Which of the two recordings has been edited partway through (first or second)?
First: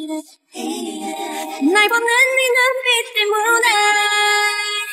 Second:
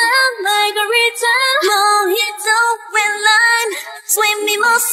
first